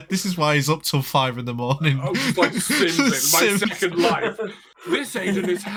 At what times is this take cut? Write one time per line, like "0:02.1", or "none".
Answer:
none